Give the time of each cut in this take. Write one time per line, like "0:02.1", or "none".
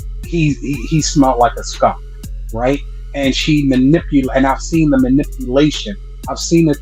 none